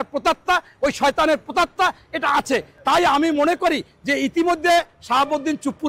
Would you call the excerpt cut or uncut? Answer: uncut